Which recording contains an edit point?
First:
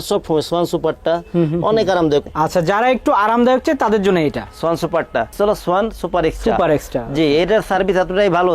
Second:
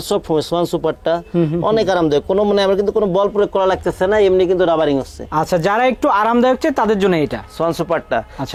first; 2 cuts; at 2.3 s, 5.3 s

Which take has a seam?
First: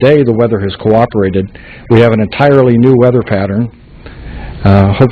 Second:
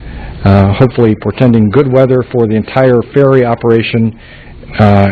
second; 1 cut; at 1.9 s

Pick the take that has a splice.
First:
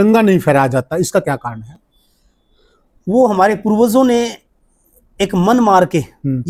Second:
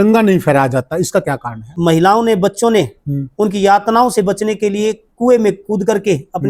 second; 1 cut; at 1.7 s

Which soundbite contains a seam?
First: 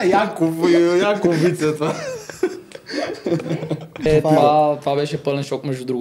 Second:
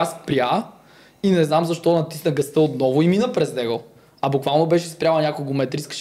first; 1 cut; at 4.1 s

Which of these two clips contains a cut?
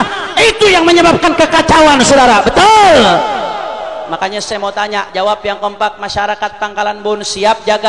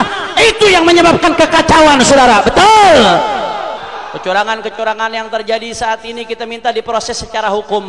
second; 1 cut; at 3.8 s

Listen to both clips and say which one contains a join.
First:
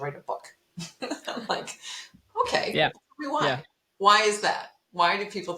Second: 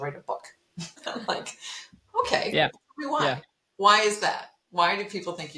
second; 1 cut; at 1.0 s

